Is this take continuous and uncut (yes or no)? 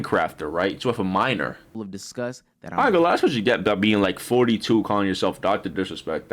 no